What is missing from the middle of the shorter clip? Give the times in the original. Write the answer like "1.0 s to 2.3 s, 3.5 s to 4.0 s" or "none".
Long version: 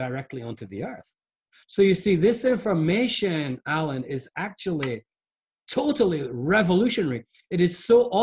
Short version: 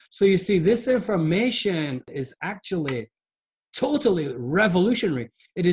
3.7 s to 4.0 s